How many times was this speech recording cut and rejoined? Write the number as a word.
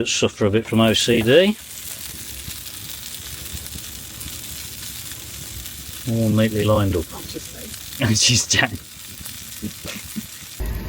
zero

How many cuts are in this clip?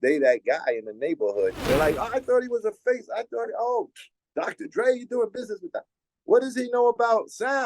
one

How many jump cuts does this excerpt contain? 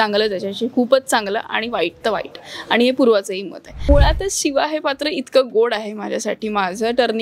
one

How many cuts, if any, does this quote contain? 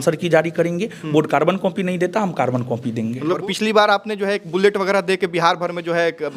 one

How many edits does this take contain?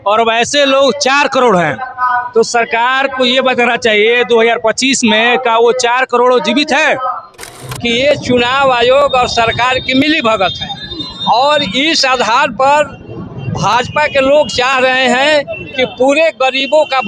one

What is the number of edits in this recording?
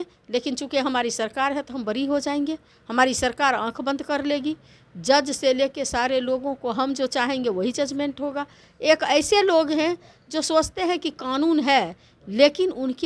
zero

